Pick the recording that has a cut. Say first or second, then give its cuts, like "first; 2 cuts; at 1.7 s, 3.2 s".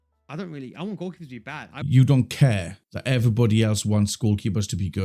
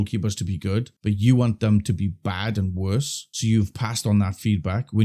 first; 1 cut; at 1.7 s